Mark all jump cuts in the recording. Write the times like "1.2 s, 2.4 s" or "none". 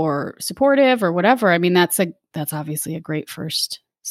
none